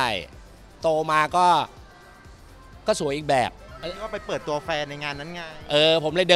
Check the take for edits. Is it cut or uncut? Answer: cut